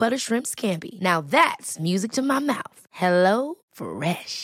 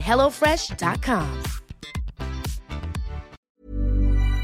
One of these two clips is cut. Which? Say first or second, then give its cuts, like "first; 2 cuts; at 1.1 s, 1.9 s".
second; 1 cut; at 3.5 s